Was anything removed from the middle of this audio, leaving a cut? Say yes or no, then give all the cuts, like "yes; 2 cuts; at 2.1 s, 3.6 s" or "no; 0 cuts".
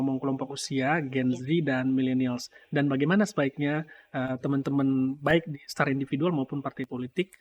no; 0 cuts